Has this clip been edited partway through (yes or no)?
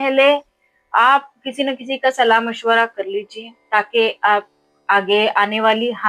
no